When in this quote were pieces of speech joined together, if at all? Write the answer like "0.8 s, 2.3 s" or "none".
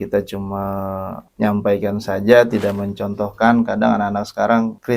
none